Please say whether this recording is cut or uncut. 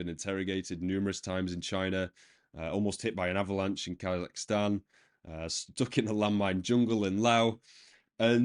uncut